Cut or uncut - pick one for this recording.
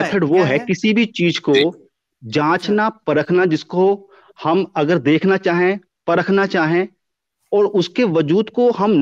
uncut